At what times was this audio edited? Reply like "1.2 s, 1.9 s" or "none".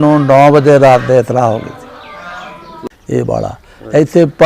2.9 s